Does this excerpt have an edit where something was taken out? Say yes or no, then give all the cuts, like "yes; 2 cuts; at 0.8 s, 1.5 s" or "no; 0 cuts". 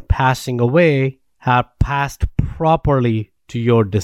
yes; 1 cut; at 1.3 s